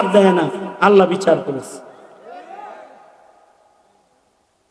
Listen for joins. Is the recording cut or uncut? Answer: uncut